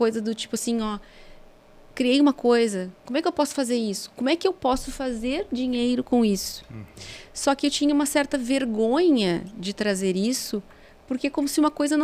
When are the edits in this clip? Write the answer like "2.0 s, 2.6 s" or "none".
none